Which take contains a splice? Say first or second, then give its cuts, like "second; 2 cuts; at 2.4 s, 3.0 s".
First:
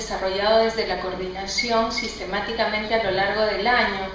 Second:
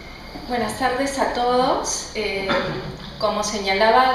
first; 1 cut; at 1.8 s